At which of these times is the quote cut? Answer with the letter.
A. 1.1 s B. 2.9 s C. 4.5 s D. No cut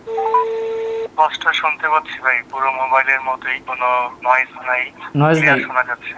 A